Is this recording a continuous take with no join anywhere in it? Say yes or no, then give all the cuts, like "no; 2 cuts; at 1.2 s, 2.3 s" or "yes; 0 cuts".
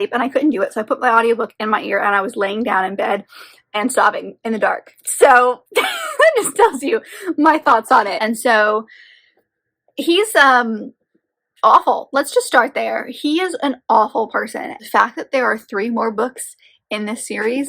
no; 2 cuts; at 8.2 s, 14.7 s